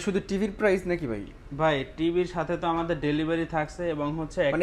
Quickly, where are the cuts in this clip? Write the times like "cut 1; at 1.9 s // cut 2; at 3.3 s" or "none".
none